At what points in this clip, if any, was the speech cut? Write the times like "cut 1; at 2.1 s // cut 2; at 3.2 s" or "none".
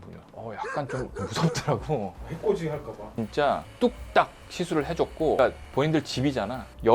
cut 1; at 3.0 s // cut 2; at 5.4 s